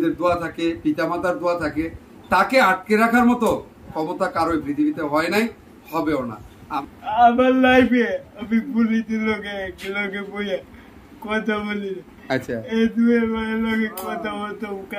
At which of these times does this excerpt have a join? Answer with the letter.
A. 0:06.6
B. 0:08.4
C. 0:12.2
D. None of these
A